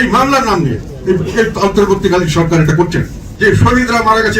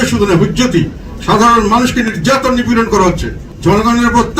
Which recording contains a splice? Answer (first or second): first